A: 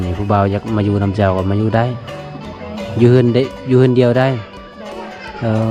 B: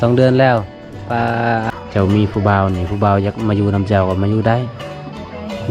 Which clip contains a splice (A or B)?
B